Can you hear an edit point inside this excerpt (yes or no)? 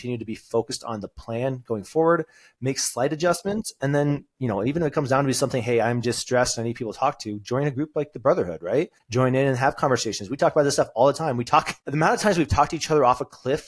yes